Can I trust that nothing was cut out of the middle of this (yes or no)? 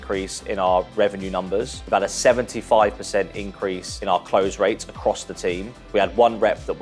no